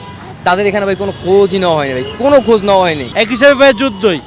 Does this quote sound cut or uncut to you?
cut